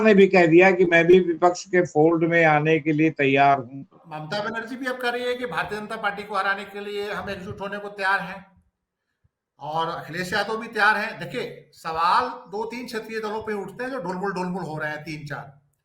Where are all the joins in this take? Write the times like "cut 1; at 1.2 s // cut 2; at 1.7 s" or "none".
cut 1; at 4.0 s